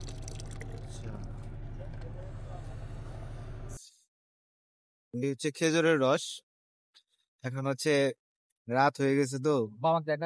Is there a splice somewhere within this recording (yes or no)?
yes